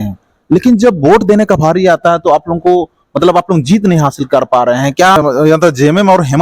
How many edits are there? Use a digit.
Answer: 1